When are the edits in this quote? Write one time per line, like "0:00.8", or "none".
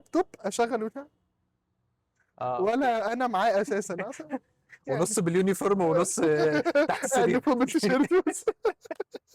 none